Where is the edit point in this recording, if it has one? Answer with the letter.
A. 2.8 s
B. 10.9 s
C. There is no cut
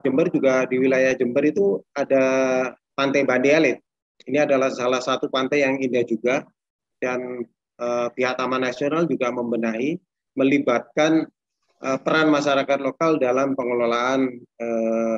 A